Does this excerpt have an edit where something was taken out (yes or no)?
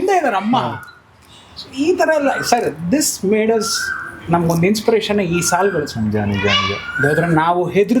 no